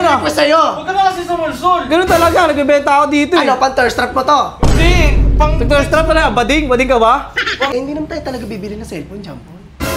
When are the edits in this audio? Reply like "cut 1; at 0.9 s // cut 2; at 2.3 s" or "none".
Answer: cut 1; at 7.7 s

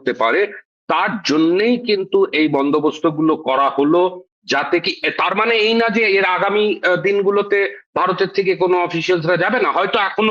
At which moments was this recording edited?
none

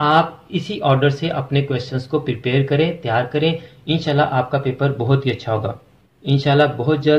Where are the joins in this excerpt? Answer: cut 1; at 6.2 s

